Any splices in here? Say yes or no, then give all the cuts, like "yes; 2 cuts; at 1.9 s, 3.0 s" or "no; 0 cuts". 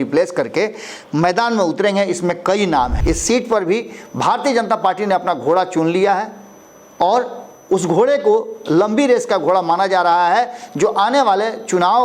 yes; 1 cut; at 3.0 s